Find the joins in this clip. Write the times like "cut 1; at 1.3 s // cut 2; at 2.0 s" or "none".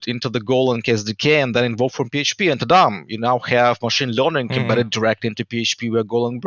none